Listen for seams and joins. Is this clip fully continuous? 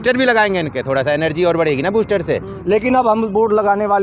no; 1 cut; at 2.5 s

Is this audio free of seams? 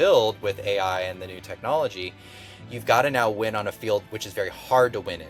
yes; 0 cuts

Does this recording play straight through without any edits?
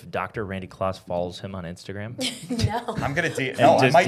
yes; 0 cuts

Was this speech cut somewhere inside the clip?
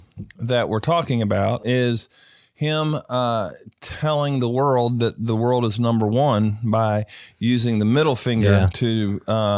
yes; 1 cut; at 1.5 s

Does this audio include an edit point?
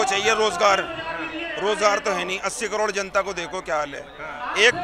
no; 0 cuts

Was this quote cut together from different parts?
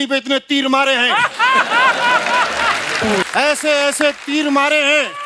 yes; 1 cut; at 3.2 s

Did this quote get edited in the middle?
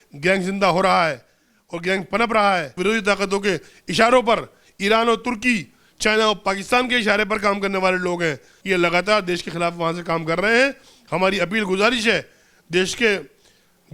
yes; 2 cuts; at 2.7 s, 8.5 s

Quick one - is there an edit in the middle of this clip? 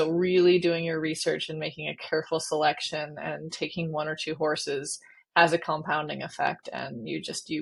no; 0 cuts

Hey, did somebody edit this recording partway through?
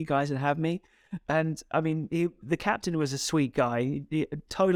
no; 0 cuts

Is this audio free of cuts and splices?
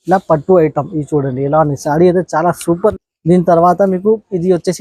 no; 1 cut; at 2.9 s

